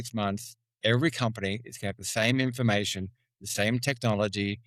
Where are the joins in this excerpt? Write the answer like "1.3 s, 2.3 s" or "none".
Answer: none